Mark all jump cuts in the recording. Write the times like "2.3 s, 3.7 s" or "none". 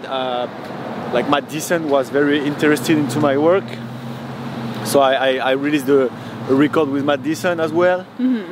none